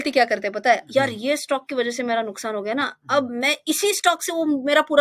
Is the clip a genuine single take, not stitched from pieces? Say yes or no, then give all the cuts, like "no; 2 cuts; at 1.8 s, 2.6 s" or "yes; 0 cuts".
yes; 0 cuts